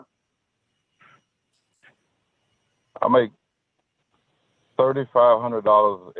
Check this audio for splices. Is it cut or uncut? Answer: uncut